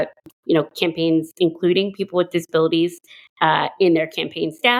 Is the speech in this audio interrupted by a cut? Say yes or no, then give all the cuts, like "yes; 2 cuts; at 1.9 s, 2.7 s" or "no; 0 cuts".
no; 0 cuts